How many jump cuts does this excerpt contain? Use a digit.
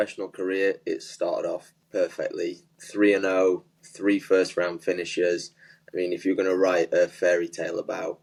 0